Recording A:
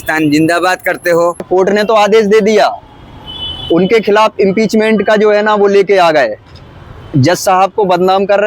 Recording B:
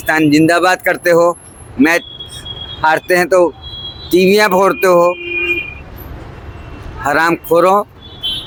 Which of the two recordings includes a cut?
A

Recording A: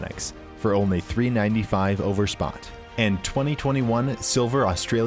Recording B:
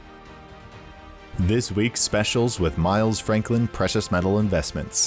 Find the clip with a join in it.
B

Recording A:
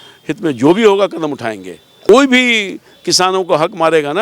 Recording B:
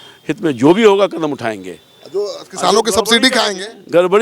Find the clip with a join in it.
A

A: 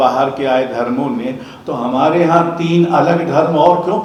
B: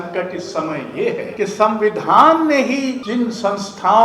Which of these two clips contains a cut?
B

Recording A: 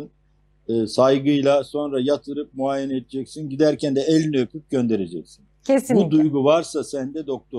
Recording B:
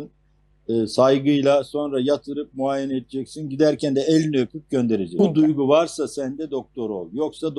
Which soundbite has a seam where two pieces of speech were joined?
B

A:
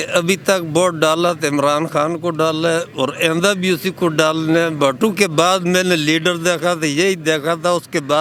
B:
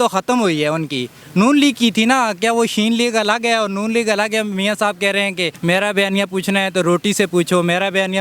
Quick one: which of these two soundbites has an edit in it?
B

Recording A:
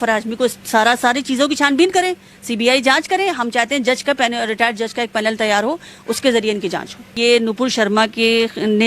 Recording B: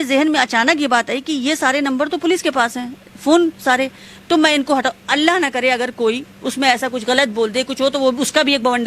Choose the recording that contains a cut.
A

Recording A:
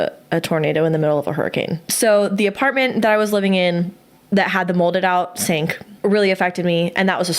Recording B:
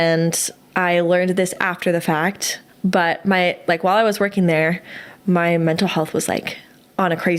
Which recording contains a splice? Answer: A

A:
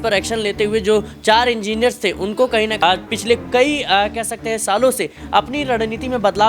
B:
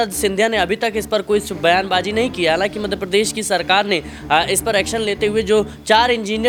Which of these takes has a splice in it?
A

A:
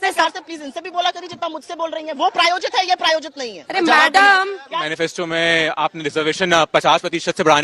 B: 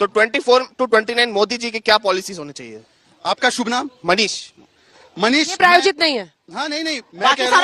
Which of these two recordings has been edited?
A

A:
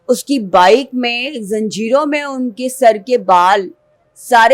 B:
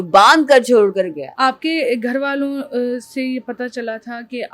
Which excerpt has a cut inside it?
B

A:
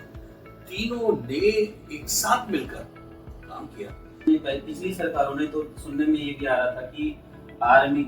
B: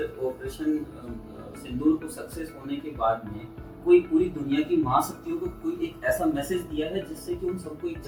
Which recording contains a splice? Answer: A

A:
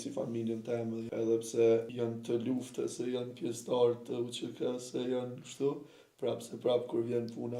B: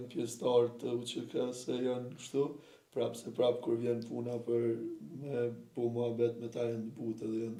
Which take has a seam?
A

